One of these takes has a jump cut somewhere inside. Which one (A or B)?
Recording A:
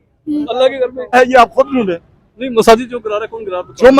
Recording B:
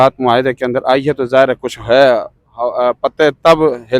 A